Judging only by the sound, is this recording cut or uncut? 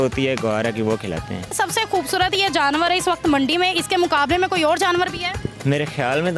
cut